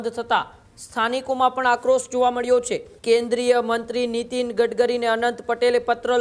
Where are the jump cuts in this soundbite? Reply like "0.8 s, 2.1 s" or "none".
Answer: 2.9 s